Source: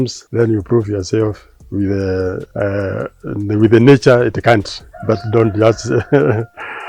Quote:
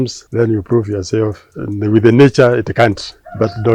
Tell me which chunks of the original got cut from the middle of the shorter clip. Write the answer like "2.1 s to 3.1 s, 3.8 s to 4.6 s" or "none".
1.5 s to 3.2 s